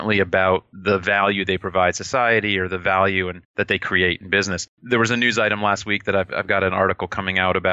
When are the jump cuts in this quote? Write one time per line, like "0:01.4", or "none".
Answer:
none